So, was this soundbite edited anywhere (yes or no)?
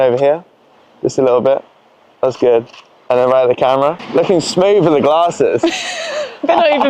yes